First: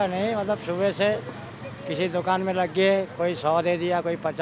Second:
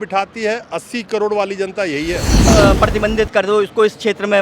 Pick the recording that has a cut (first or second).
second